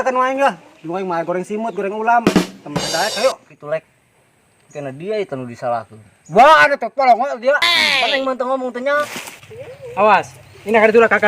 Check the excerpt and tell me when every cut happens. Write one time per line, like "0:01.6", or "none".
0:03.5
0:09.0